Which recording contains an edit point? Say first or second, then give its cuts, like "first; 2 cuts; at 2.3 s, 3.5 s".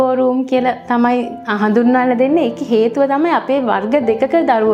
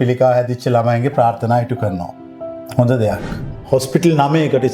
second; 1 cut; at 3.6 s